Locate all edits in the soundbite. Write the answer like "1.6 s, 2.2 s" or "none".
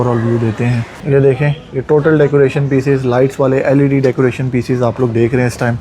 0.9 s